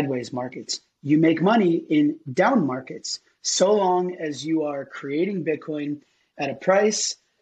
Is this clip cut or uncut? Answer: uncut